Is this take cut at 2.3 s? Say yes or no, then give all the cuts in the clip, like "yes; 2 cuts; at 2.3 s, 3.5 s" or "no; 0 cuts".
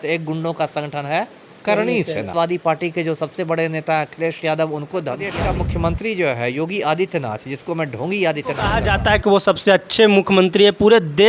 yes; 3 cuts; at 2.3 s, 5.3 s, 8.7 s